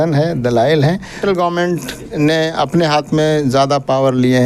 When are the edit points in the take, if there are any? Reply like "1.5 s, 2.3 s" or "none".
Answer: 1.2 s